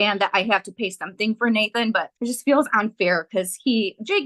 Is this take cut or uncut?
cut